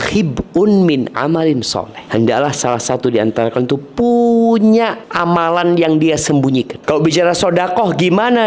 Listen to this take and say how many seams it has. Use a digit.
3